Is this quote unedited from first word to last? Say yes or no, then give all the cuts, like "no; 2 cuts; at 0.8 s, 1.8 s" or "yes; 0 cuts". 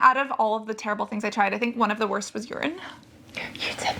yes; 0 cuts